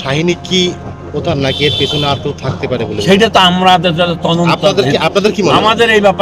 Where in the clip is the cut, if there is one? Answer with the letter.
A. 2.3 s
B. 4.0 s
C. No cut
C